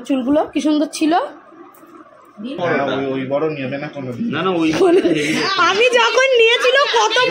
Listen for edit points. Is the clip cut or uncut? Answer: cut